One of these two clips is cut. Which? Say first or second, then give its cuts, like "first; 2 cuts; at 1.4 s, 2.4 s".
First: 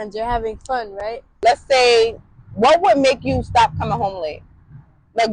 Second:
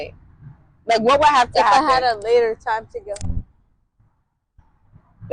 first; 1 cut; at 1.3 s